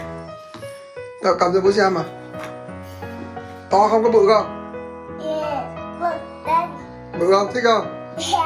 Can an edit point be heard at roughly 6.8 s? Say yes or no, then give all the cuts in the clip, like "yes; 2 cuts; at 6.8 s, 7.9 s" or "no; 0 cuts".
no; 1 cut; at 1.2 s